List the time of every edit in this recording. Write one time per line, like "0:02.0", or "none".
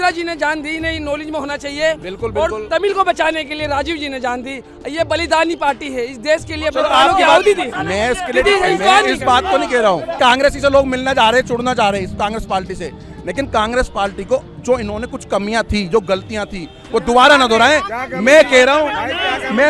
none

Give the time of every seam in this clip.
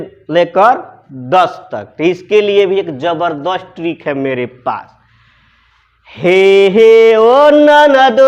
none

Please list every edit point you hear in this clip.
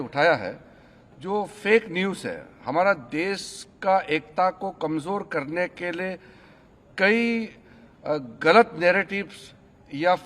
none

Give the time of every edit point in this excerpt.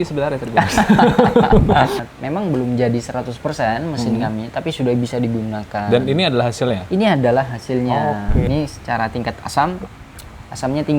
0:02.0
0:08.4

